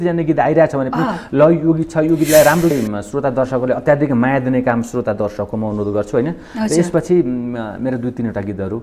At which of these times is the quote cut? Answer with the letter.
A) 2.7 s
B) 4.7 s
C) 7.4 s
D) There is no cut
A